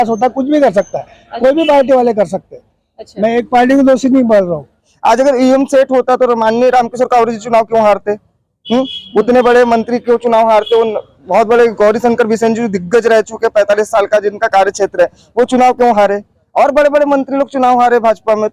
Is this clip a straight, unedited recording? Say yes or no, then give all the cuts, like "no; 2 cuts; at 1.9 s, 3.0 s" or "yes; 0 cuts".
no; 1 cut; at 4.9 s